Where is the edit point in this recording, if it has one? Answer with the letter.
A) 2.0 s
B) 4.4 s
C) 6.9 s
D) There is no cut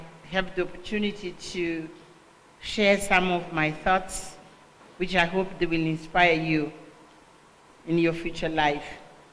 C